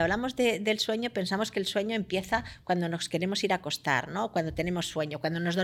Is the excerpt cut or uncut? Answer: uncut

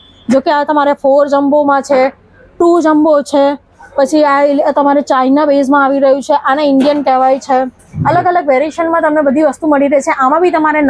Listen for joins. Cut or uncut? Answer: uncut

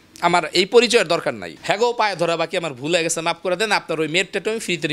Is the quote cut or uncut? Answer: cut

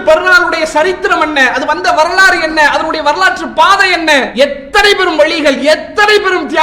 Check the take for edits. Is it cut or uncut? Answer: cut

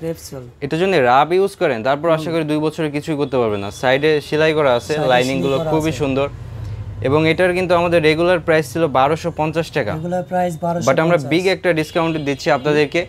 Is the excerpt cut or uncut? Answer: uncut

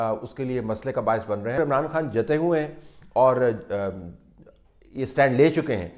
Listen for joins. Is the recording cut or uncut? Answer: cut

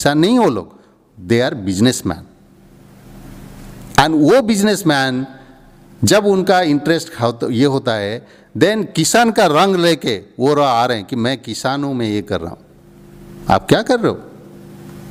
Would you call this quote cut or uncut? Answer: uncut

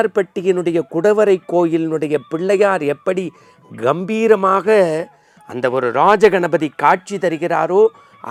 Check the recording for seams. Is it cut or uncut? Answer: uncut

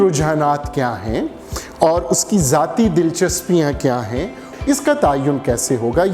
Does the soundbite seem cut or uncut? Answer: cut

